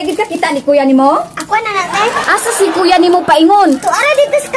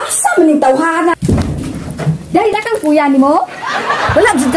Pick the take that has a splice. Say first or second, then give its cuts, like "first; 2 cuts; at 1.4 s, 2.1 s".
second; 2 cuts; at 1.1 s, 2.5 s